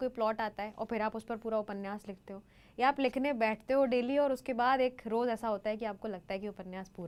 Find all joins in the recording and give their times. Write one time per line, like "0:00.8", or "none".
none